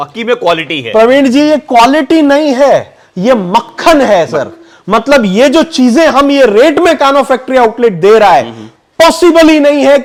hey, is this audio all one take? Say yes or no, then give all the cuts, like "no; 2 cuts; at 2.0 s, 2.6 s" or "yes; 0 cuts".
yes; 0 cuts